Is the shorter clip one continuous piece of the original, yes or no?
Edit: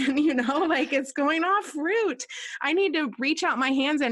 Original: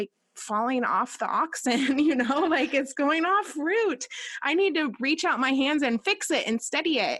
yes